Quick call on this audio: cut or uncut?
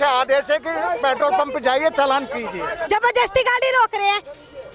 cut